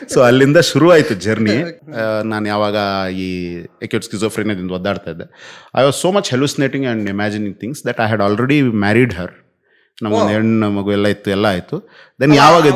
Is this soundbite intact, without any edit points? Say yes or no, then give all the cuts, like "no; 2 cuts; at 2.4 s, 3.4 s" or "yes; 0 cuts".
no; 1 cut; at 1.8 s